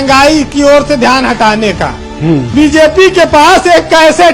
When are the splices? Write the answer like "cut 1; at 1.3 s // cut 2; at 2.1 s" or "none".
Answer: cut 1; at 2.5 s

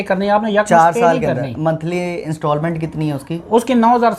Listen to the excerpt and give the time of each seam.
none

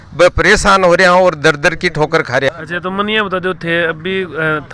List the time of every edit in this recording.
none

